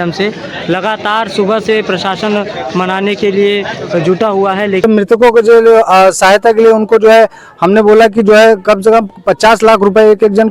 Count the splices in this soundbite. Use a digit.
1